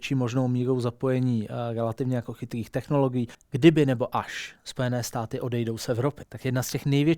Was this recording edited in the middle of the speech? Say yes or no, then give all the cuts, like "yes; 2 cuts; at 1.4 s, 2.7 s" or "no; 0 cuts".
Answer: yes; 2 cuts; at 3.4 s, 6.3 s